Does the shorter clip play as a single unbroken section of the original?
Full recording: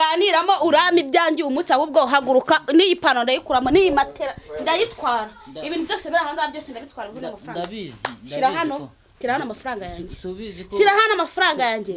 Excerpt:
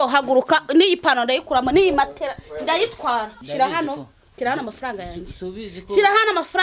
no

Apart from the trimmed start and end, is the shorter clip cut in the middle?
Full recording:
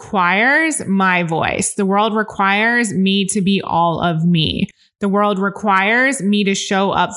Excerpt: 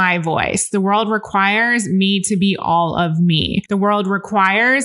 yes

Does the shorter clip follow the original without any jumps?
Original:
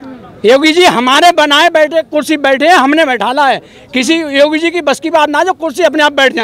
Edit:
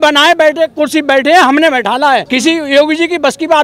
no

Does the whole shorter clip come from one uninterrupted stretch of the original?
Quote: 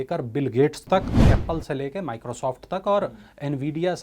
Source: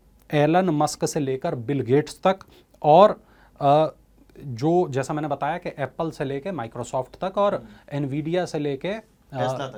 no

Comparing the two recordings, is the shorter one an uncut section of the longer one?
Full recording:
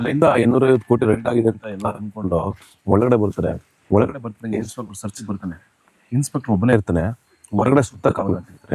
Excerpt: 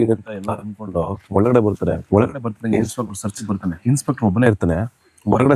no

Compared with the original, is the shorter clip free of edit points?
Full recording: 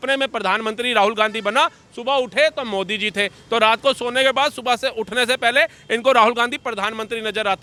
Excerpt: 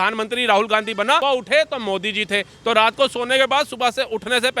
no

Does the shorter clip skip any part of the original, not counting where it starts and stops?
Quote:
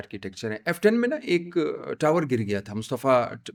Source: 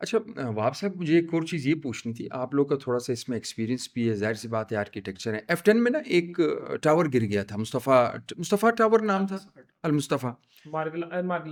no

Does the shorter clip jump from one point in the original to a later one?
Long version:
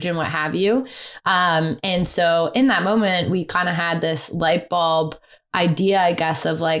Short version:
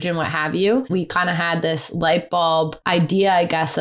yes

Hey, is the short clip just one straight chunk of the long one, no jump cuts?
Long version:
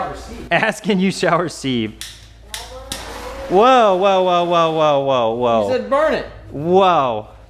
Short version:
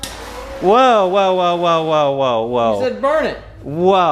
yes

